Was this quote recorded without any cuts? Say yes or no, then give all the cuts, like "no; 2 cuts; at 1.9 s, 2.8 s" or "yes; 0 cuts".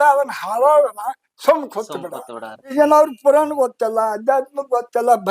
no; 1 cut; at 2.6 s